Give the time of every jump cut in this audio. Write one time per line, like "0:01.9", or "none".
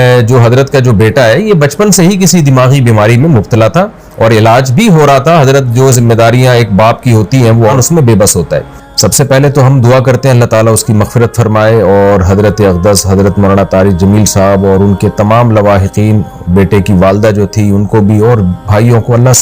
0:07.7
0:08.8